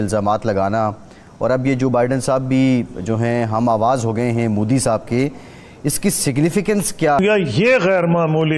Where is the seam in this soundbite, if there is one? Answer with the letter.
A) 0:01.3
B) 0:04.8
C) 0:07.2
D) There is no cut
C